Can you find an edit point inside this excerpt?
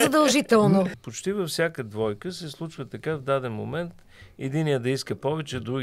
yes; 1 cut; at 1.0 s

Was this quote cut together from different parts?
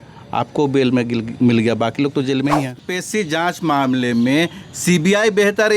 yes; 1 cut; at 2.8 s

